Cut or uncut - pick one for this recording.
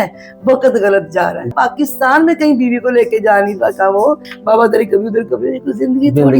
cut